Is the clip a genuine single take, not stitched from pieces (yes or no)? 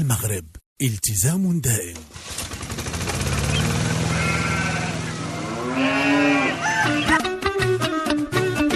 no